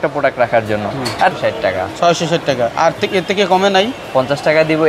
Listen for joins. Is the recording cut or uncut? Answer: cut